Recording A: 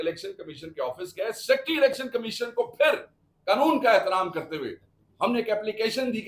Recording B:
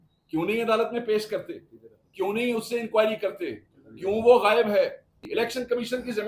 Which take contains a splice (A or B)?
B